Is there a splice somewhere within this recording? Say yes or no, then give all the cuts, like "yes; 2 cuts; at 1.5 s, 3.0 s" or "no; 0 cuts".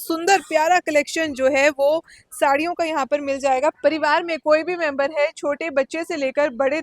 yes; 1 cut; at 3.7 s